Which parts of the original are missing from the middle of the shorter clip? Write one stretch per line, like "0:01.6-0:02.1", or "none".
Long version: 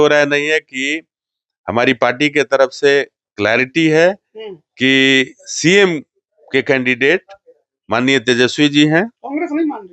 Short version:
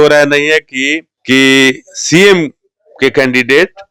0:01.1-0:04.6